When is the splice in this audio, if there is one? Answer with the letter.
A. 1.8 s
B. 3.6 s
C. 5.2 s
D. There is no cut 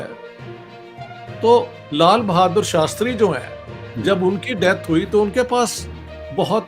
A